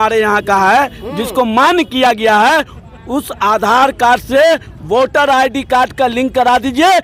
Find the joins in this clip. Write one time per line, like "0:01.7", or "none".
none